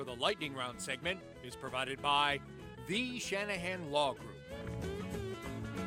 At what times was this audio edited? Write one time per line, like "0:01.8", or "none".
0:04.4